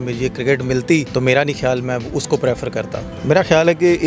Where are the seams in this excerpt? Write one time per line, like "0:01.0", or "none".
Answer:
0:01.1
0:03.1